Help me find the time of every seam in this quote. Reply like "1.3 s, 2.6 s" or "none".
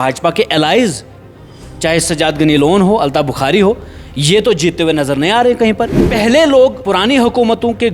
6.0 s, 6.8 s